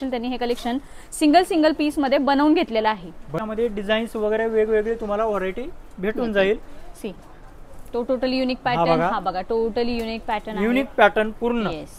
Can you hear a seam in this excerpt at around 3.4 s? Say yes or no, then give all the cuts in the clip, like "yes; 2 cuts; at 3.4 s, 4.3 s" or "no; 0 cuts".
no; 0 cuts